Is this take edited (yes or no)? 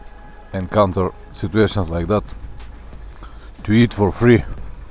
no